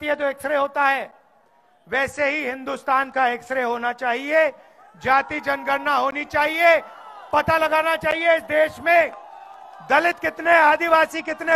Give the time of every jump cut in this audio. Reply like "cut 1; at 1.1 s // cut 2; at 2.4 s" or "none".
none